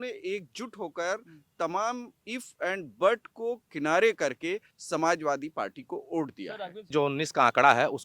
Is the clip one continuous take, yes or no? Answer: no